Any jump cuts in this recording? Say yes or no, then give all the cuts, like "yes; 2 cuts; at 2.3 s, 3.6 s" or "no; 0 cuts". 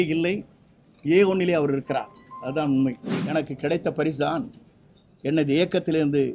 yes; 1 cut; at 3.2 s